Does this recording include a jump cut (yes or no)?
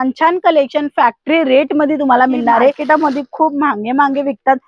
yes